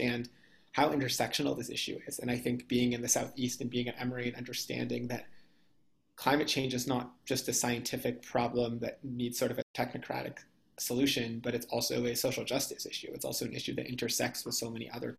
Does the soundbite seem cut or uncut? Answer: cut